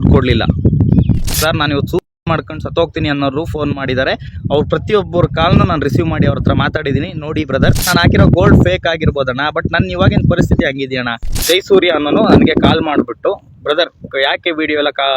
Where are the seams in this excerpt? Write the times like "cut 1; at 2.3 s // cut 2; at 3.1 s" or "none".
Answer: cut 1; at 1.3 s // cut 2; at 7.9 s // cut 3; at 11.4 s